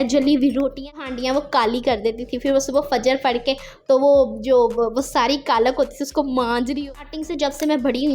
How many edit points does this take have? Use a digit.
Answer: 2